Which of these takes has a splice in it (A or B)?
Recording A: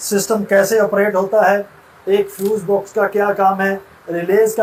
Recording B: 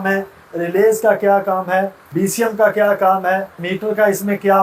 B